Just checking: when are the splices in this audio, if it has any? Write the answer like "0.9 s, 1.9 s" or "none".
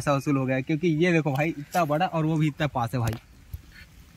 none